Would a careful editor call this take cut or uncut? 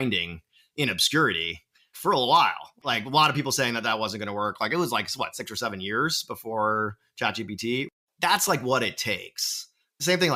uncut